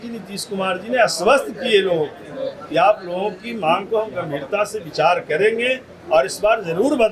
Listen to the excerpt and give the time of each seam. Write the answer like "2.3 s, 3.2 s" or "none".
none